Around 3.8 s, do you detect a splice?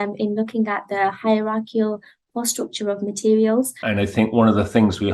yes; 1 cut; at 3.8 s

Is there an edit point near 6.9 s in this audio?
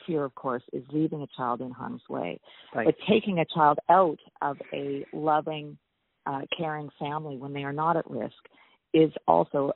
no; 0 cuts

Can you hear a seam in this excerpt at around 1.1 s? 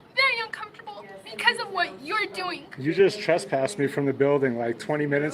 yes; 1 cut; at 1.1 s

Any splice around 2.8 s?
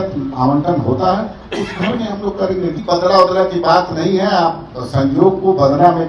yes; 1 cut; at 2.8 s

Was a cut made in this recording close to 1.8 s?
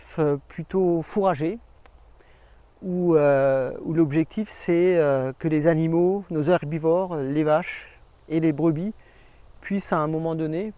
no; 0 cuts

